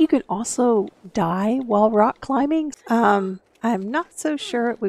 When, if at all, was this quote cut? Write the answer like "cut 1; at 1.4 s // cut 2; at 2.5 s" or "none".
cut 1; at 2.7 s